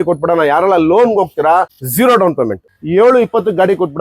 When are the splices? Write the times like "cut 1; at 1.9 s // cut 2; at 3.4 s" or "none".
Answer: cut 1; at 1.8 s // cut 2; at 2.7 s